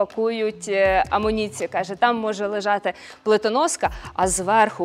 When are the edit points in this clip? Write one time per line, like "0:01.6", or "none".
none